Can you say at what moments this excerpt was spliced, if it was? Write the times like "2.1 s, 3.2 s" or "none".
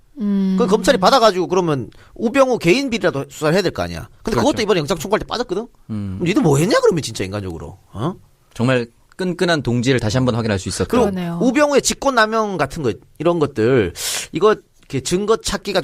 5.5 s